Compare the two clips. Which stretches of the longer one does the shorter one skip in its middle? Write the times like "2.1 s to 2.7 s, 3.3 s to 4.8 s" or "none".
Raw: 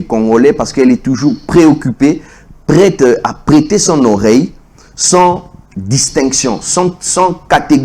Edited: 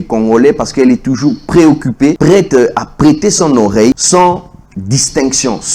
2.2 s to 2.7 s, 4.5 s to 5.0 s